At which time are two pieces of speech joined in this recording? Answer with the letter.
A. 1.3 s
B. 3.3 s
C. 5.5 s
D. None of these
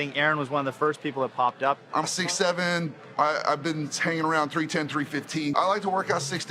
C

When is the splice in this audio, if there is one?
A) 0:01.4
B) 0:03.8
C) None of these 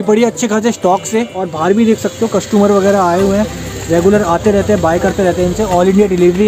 A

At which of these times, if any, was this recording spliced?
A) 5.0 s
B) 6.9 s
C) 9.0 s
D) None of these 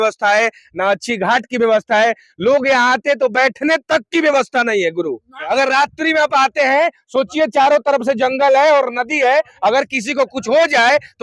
D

